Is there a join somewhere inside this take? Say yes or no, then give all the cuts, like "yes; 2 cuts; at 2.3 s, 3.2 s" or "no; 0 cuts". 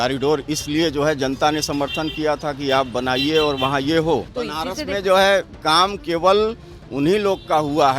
yes; 1 cut; at 4.3 s